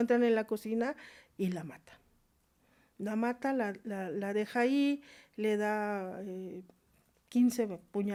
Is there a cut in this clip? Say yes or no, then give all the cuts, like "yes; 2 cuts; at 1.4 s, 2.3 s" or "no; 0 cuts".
no; 0 cuts